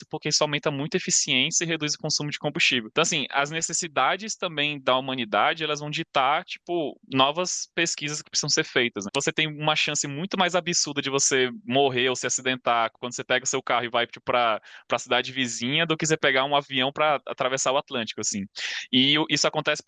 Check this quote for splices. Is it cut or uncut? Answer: cut